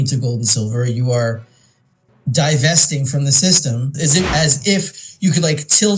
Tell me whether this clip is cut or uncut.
cut